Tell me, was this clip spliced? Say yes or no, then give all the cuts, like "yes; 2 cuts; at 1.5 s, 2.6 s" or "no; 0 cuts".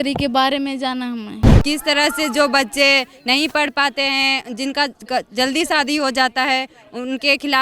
yes; 1 cut; at 1.5 s